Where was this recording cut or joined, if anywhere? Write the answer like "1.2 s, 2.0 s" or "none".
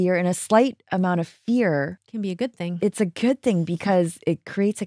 2.0 s